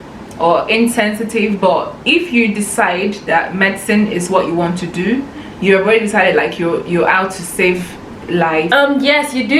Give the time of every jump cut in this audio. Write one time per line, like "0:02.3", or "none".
0:08.7